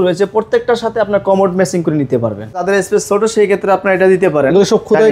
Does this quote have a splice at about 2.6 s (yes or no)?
yes